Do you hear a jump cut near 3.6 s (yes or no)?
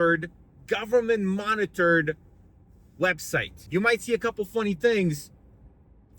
yes